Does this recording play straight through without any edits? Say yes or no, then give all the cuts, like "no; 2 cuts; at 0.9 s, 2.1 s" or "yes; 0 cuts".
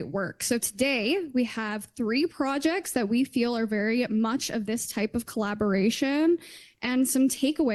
yes; 0 cuts